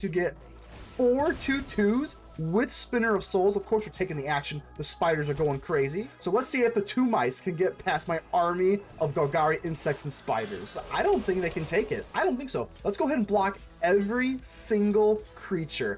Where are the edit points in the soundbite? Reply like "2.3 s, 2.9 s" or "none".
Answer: 6.1 s, 10.8 s